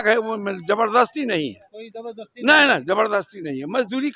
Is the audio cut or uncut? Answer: uncut